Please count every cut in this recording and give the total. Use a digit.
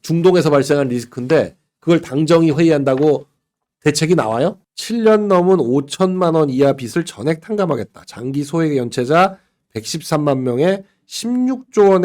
1